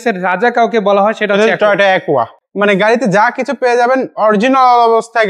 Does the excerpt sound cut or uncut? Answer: cut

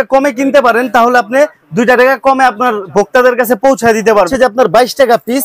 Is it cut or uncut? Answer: cut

